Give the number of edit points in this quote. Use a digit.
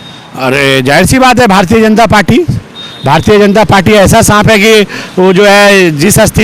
0